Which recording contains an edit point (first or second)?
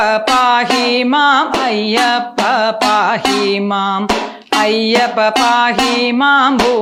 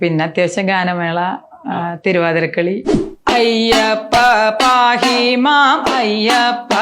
second